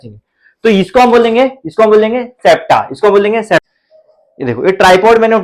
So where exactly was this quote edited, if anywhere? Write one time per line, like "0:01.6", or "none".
0:03.7